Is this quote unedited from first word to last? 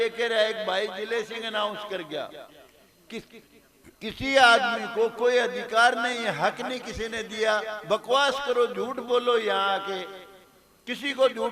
yes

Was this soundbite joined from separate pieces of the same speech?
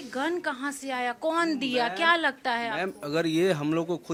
no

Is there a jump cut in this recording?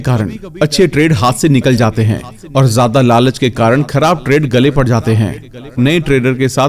no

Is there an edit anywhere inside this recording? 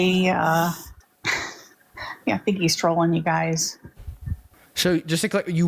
no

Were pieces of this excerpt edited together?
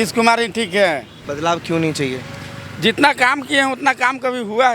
yes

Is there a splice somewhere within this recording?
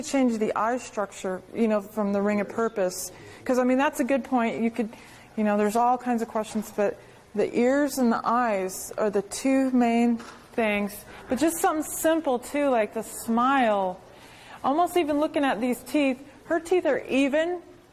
no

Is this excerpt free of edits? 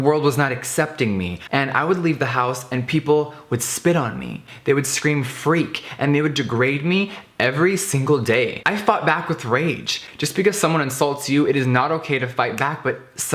no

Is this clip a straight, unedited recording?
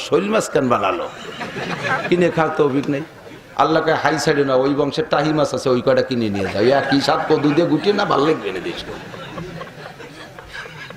yes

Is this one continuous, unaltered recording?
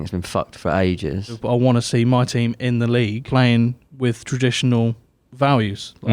no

